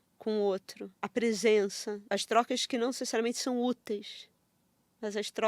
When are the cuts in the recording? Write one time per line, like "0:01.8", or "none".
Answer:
0:01.0
0:02.0